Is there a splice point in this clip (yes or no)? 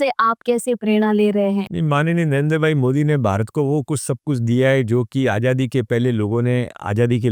yes